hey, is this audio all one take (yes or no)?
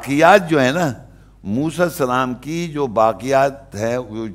yes